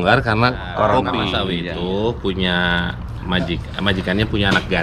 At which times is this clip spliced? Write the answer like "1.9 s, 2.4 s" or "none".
1.4 s